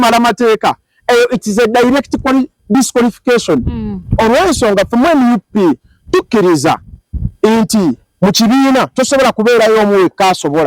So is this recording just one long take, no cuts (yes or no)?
yes